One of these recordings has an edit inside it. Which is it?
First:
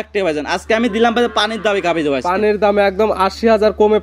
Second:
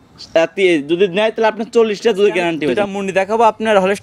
second; 1 cut; at 2.8 s

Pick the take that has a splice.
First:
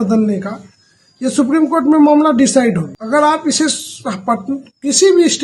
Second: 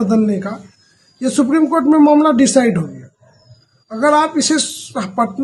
first; 1 cut; at 2.9 s

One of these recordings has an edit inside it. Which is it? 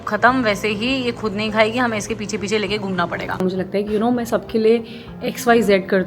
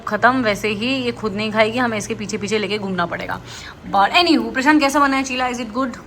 first; 1 cut; at 3.4 s

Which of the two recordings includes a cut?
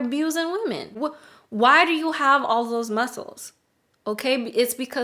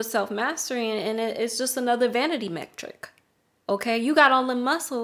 first; 1 cut; at 0.9 s

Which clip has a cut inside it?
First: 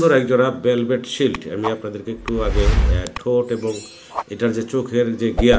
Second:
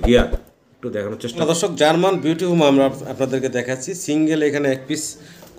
second; 1 cut; at 1.2 s

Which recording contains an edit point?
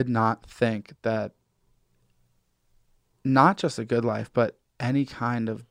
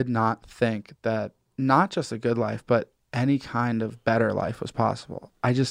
second; 1 cut; at 1.4 s

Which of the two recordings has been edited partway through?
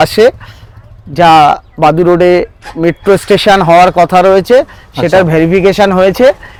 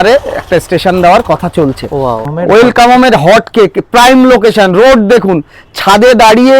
second; 1 cut; at 2.3 s

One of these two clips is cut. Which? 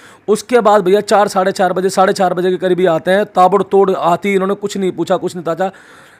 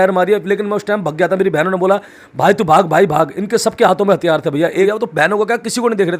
second; 1 cut; at 4.9 s

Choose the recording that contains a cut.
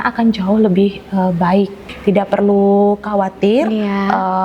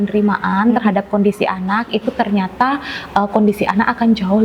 first; 1 cut; at 1.9 s

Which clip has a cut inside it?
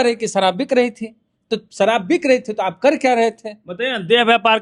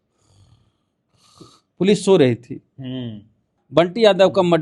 second; 1 cut; at 3.6 s

